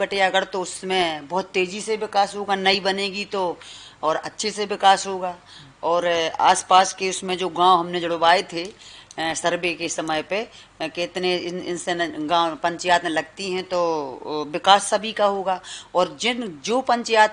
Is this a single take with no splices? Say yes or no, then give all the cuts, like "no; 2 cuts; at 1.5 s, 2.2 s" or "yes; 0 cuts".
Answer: yes; 0 cuts